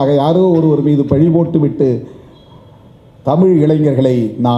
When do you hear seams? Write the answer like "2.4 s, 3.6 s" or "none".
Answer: none